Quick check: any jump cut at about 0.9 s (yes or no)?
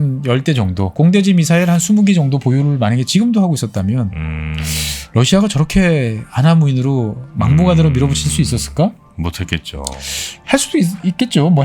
yes